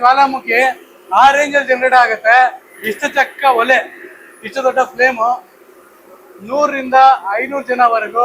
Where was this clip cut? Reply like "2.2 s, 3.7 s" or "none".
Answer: none